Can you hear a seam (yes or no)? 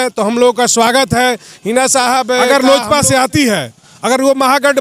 yes